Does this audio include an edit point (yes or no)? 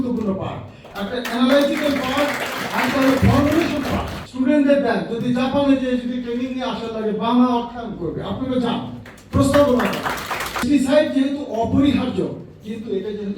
yes